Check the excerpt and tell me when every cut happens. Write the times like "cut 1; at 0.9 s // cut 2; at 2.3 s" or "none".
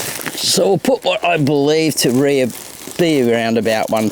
none